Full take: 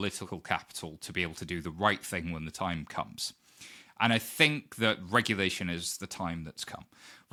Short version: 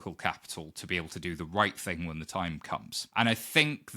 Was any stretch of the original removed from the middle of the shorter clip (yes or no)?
yes